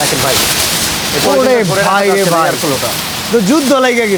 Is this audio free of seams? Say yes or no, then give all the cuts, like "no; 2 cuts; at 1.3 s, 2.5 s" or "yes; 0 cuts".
yes; 0 cuts